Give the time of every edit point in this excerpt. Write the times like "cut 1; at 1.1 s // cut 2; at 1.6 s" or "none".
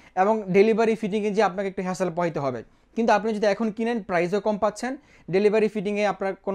none

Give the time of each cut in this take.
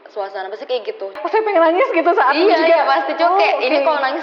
cut 1; at 1.1 s

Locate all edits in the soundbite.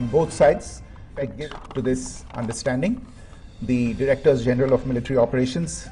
cut 1; at 1.3 s

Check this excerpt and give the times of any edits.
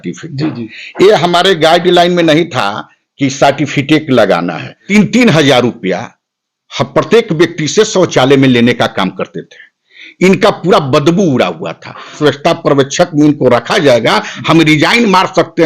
cut 1; at 4.7 s // cut 2; at 12.2 s

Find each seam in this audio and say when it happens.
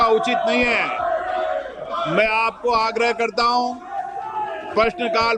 none

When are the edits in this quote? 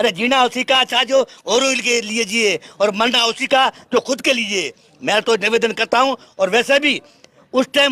none

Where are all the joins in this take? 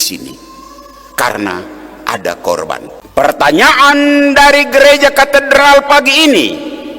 cut 1; at 3.0 s

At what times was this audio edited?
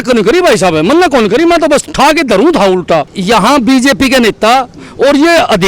cut 1; at 3.1 s

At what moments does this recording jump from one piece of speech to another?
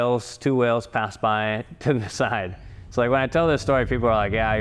none

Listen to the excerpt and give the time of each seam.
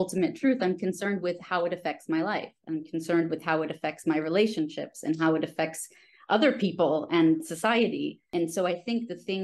cut 1; at 8.3 s

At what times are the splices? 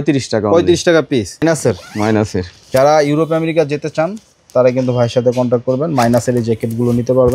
cut 1; at 1.4 s

